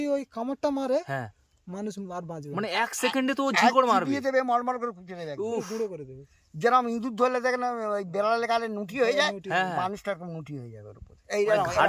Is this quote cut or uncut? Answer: uncut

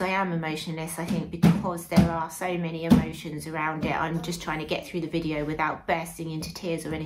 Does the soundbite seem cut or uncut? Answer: uncut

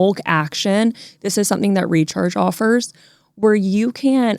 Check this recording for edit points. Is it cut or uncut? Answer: uncut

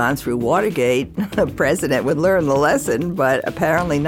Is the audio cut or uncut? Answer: uncut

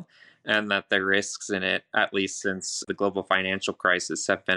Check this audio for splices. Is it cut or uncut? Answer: cut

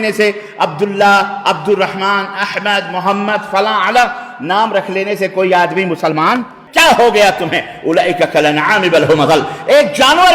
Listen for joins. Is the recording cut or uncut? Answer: cut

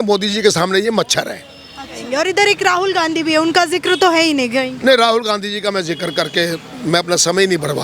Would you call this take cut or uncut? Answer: cut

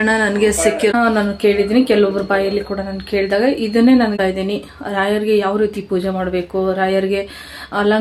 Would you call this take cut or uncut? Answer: cut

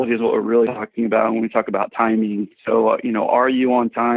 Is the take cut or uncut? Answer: uncut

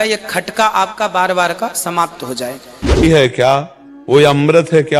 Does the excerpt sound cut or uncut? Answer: cut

